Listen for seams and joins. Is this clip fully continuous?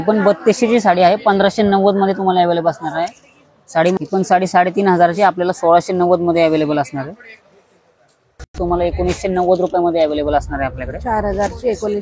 no; 2 cuts; at 4.0 s, 8.4 s

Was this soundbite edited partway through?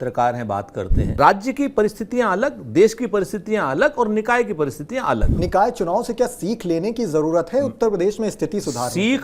yes; 2 cuts; at 1.0 s, 5.3 s

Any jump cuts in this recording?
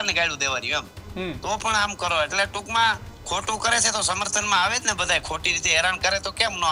no; 0 cuts

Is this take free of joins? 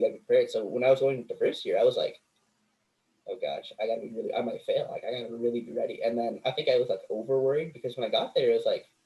yes; 0 cuts

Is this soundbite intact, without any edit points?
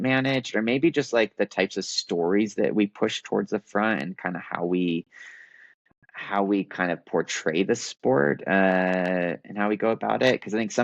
yes; 0 cuts

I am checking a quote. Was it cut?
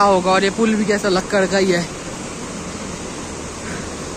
no; 0 cuts

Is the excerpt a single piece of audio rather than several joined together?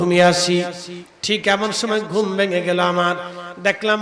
yes; 0 cuts

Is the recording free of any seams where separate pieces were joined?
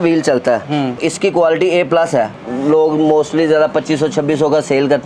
no; 2 cuts; at 1.0 s, 2.4 s

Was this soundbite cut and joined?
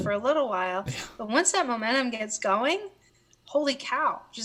no; 0 cuts

